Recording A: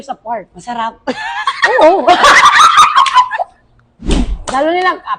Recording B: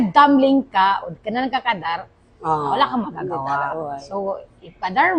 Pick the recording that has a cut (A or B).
A